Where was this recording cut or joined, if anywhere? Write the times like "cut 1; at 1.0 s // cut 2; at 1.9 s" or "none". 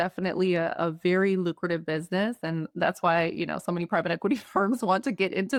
none

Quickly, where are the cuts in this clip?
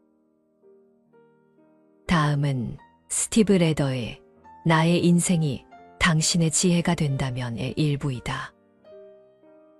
cut 1; at 8.6 s

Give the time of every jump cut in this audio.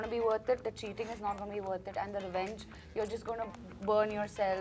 cut 1; at 3.6 s

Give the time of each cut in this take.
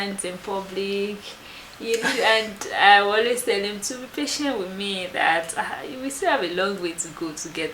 cut 1; at 2.0 s

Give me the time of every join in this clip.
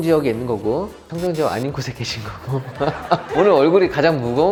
none

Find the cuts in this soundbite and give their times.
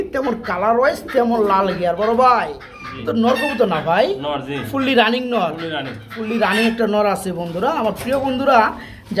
none

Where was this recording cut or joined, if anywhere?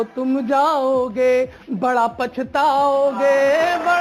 none

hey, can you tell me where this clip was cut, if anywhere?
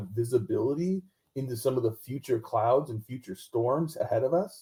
none

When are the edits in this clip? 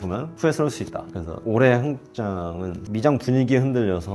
cut 1; at 1.1 s // cut 2; at 2.7 s

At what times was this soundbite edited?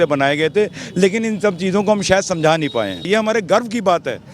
cut 1; at 3.1 s

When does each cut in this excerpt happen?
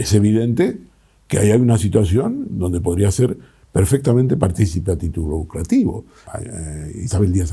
cut 1; at 6.1 s

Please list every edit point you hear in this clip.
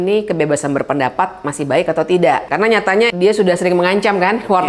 cut 1; at 2.9 s

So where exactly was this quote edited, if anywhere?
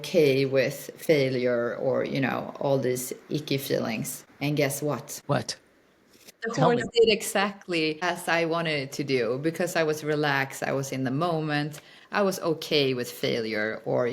cut 1; at 4.2 s // cut 2; at 5.1 s // cut 3; at 6.3 s // cut 4; at 8.0 s

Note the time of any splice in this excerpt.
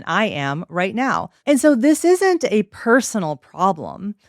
cut 1; at 1.3 s

